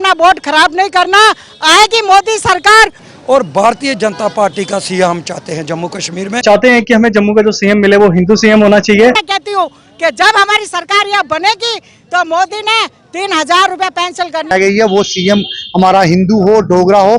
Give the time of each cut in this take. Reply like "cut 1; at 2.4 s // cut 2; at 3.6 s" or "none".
cut 1; at 3.0 s // cut 2; at 6.4 s // cut 3; at 9.2 s // cut 4; at 14.5 s